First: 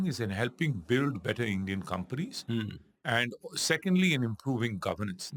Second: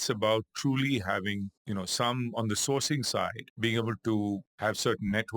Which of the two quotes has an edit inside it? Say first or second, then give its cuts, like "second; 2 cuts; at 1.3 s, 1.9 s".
second; 3 cuts; at 1.6 s, 3.4 s, 4.5 s